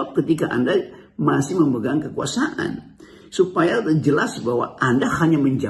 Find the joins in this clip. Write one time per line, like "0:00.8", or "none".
none